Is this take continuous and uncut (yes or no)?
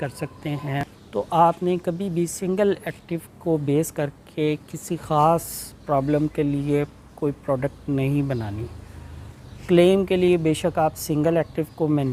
yes